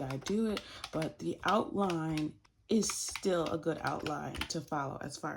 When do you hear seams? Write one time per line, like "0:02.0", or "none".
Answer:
0:02.5